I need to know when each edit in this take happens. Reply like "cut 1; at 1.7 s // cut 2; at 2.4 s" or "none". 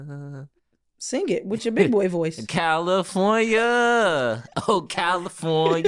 none